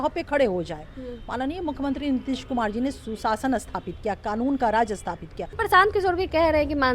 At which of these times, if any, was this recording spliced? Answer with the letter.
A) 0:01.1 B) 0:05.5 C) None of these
B